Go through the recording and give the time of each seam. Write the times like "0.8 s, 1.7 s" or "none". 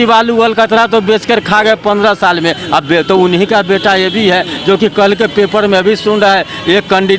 none